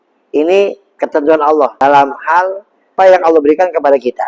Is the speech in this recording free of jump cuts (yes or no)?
no